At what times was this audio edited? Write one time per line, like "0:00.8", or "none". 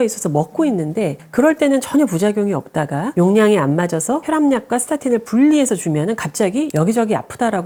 none